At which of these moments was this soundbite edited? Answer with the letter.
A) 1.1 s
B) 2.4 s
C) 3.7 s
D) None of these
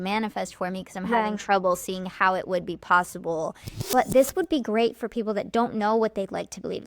C